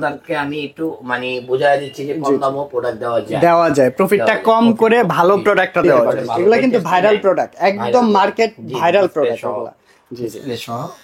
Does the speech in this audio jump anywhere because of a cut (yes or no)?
yes